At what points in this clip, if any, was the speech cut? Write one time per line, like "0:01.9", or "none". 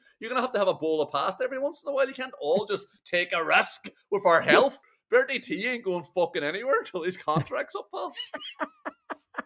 0:04.9